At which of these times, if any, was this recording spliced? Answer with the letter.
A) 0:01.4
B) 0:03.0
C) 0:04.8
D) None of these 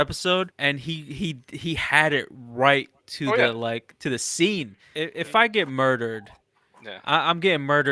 C